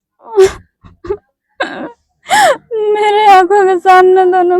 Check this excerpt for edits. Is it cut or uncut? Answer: uncut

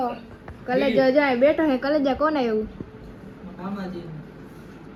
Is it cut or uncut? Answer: uncut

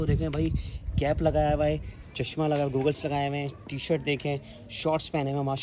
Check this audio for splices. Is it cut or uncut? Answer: uncut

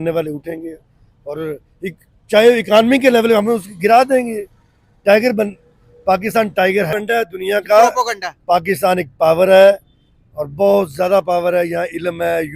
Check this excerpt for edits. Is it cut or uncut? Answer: cut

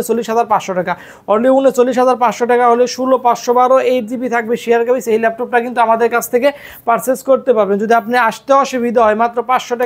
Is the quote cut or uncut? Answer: uncut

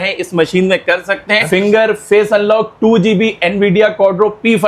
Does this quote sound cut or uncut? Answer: cut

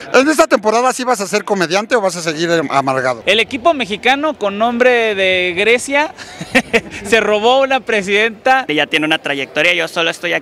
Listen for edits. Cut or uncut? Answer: cut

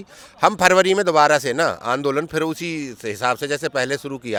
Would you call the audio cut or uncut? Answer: uncut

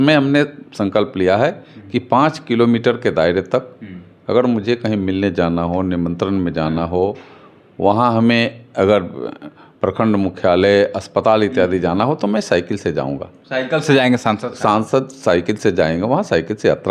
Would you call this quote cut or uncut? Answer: uncut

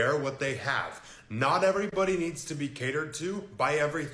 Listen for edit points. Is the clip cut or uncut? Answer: cut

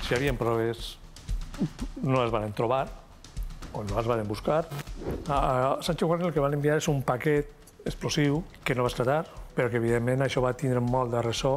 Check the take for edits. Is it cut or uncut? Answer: cut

